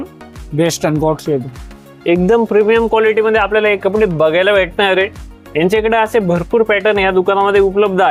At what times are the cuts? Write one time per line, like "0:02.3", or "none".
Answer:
none

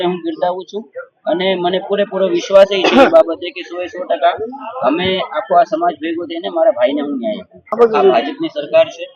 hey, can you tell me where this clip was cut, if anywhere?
0:07.6

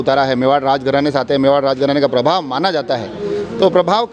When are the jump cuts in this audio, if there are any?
none

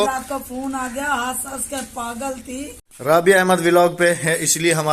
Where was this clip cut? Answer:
0:02.8

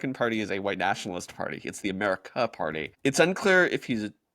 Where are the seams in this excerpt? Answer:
0:02.9

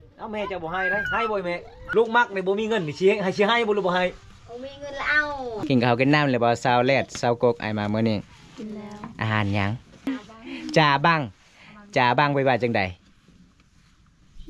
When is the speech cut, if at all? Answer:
0:01.7
0:05.6
0:10.1

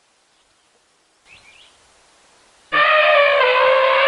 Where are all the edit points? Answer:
none

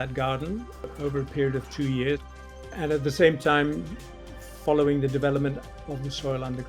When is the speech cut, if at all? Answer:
0:02.4
0:05.7

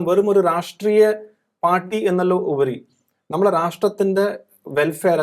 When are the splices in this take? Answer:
none

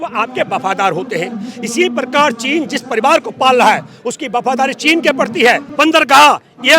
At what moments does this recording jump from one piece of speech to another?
0:05.7

